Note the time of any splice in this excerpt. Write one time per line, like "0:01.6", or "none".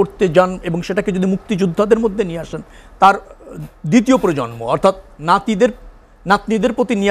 none